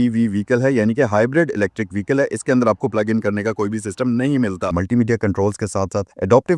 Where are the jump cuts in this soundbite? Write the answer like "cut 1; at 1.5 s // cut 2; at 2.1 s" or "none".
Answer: cut 1; at 4.7 s